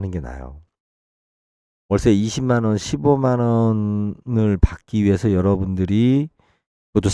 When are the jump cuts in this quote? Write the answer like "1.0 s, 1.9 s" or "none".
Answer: none